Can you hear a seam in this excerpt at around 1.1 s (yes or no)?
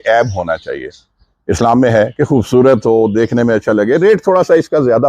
no